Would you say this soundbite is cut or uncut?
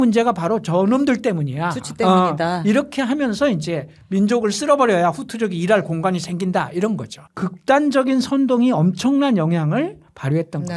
cut